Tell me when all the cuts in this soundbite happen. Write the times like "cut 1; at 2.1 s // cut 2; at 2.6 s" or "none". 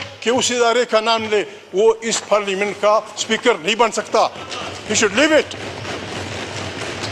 none